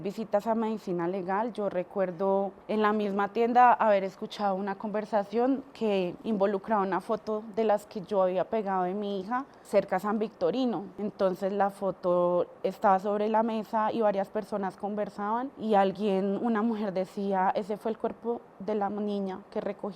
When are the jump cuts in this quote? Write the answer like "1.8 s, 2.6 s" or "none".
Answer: 2.6 s, 6.2 s, 9.6 s, 10.9 s, 15.5 s